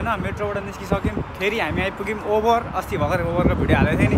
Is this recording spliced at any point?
no; 0 cuts

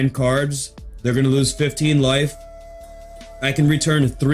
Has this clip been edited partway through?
no; 0 cuts

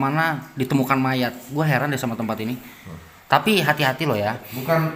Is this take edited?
no; 0 cuts

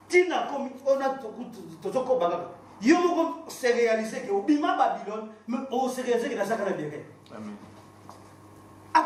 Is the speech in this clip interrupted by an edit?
no; 0 cuts

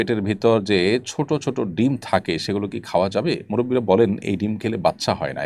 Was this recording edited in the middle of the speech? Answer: no; 0 cuts

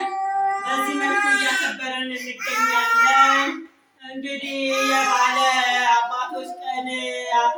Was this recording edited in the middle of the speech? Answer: no; 0 cuts

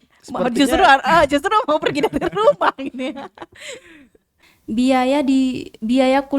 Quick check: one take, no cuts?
no; 1 cut; at 4.4 s

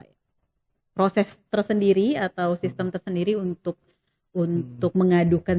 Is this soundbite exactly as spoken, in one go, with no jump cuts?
yes; 0 cuts

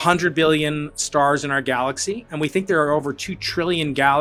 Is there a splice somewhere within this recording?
no; 0 cuts

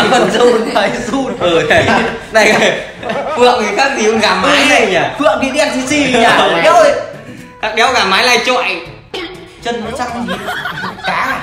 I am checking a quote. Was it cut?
no; 0 cuts

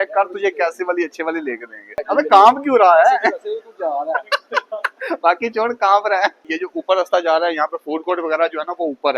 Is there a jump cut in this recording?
yes; 2 cuts; at 2.0 s, 6.5 s

